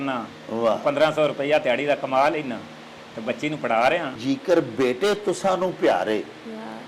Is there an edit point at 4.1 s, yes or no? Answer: yes